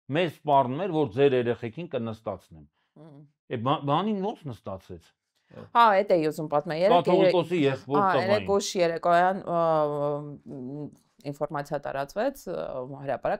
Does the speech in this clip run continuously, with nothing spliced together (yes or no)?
yes